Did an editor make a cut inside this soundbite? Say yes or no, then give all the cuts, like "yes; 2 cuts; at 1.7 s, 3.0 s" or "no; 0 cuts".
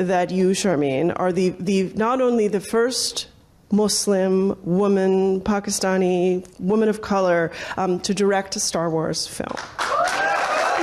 no; 0 cuts